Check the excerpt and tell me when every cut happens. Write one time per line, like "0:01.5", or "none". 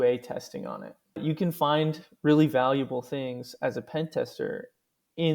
0:01.2